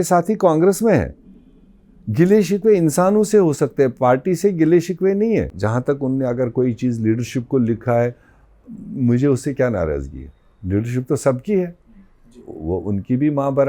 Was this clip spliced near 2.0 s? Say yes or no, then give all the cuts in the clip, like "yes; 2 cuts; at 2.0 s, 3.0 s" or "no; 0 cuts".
no; 1 cut; at 5.5 s